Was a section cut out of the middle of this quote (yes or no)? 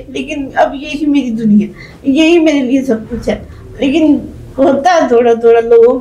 no